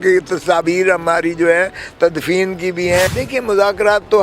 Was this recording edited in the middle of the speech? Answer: yes; 1 cut; at 3.1 s

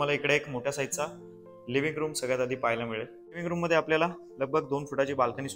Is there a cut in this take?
yes; 1 cut; at 3.4 s

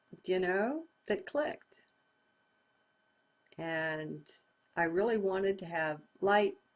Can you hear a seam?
yes; 1 cut; at 4.1 s

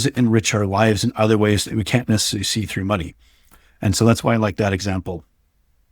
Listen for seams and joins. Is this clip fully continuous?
yes; 0 cuts

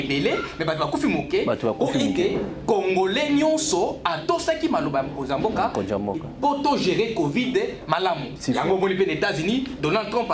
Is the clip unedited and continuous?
no; 1 cut; at 8.3 s

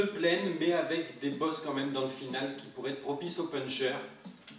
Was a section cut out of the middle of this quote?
no; 0 cuts

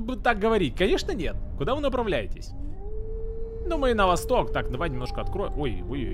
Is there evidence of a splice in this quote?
no; 0 cuts

